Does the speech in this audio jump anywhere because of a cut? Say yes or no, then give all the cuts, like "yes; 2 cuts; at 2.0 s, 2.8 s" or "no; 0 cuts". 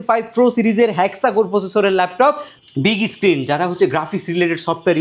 yes; 1 cut; at 2.5 s